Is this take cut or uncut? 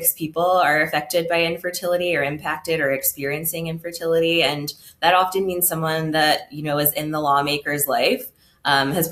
uncut